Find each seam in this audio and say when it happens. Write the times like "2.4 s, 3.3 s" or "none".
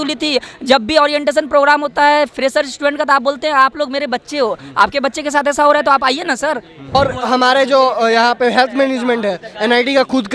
6.9 s